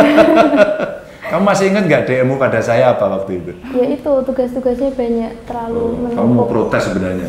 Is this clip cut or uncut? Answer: cut